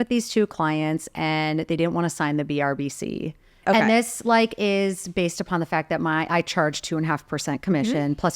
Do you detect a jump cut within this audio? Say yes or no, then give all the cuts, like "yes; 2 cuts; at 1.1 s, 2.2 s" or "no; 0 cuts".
yes; 1 cut; at 3.6 s